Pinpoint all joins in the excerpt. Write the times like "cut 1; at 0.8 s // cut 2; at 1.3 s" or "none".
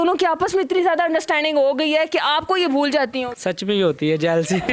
cut 1; at 3.3 s

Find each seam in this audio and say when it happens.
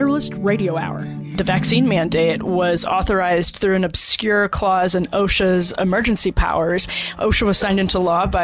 cut 1; at 1.3 s

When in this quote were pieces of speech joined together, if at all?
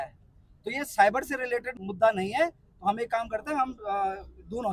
cut 1; at 1.7 s

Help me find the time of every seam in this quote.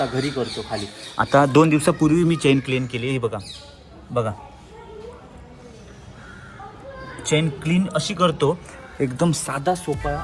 none

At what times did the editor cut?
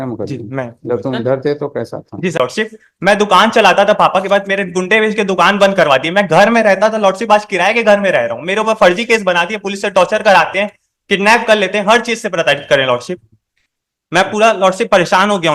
cut 1; at 2.4 s

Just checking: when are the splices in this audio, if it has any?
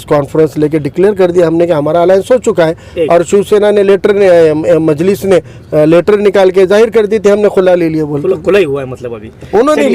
none

